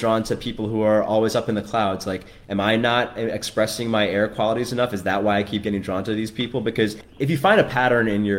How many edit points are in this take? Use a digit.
1